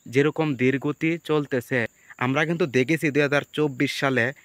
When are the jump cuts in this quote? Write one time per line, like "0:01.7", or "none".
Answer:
0:02.0